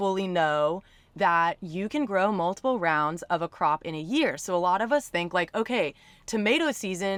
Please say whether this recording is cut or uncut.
uncut